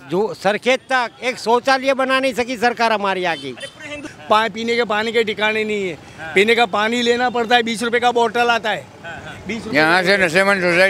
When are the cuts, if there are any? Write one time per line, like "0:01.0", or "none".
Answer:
0:04.0